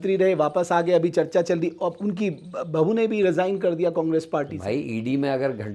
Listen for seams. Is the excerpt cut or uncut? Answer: uncut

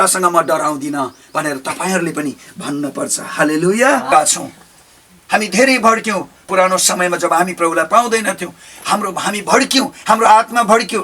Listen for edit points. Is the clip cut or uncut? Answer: cut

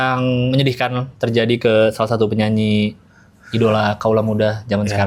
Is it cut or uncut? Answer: uncut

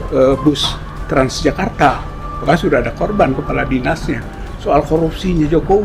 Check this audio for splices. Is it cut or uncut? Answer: uncut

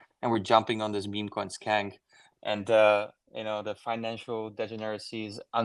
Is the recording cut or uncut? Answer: uncut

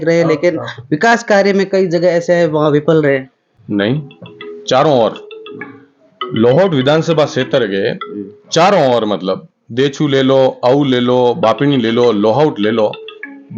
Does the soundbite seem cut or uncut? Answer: uncut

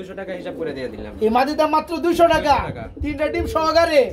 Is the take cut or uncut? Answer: uncut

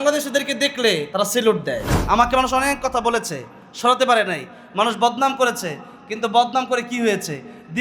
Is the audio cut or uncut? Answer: cut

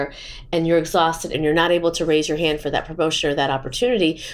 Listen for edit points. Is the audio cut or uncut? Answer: cut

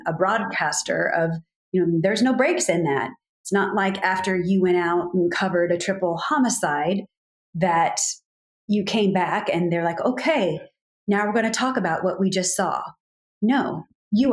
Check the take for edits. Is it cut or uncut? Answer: uncut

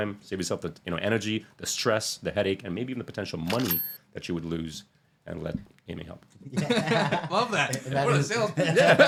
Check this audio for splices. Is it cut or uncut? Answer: uncut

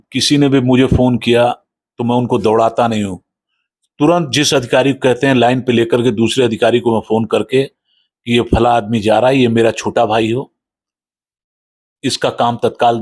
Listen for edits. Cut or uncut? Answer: uncut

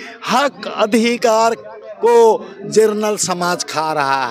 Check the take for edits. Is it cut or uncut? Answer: uncut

